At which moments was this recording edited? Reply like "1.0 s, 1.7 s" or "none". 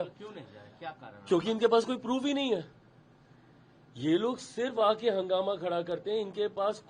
none